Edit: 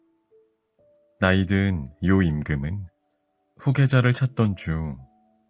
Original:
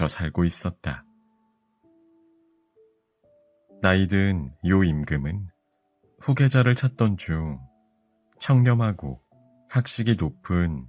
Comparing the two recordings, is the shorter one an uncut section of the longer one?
no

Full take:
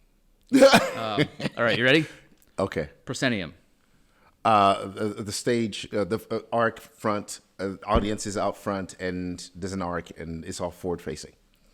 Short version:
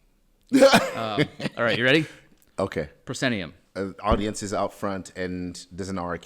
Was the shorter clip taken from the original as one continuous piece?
no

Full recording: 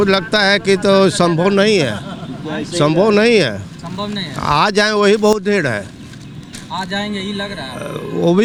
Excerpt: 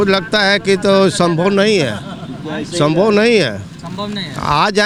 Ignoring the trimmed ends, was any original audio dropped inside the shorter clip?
no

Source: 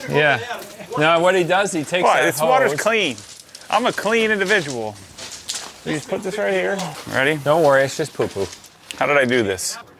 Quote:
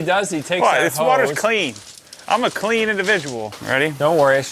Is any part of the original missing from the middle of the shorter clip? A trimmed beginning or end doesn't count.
yes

